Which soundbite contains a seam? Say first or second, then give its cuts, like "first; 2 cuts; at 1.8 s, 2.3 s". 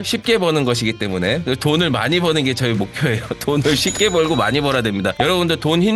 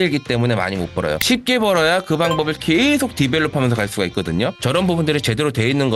second; 1 cut; at 4.6 s